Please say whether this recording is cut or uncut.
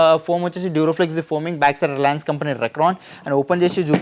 uncut